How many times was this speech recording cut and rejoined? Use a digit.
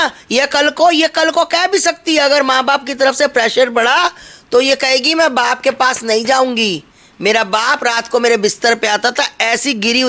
0